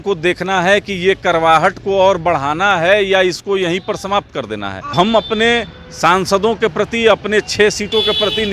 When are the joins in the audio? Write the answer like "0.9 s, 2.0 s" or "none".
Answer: 4.9 s